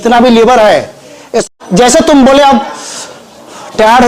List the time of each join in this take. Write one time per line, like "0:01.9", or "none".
0:01.4